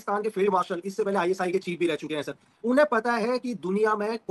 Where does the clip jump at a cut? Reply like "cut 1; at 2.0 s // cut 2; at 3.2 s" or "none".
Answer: none